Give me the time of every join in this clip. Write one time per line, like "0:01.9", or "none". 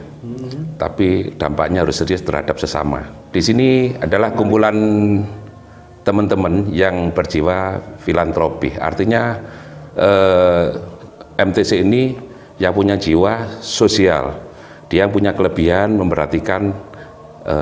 0:03.2